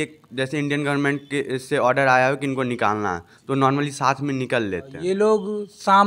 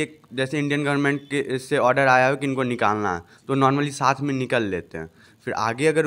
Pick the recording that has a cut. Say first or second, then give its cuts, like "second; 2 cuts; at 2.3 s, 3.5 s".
first; 1 cut; at 4.9 s